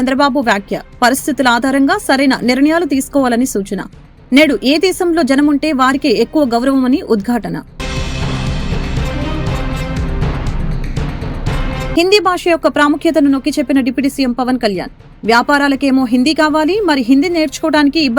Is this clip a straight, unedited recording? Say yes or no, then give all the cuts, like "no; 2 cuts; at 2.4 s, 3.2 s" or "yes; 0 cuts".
yes; 0 cuts